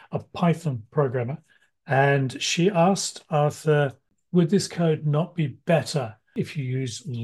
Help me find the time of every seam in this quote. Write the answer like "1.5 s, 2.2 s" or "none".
4.1 s, 6.3 s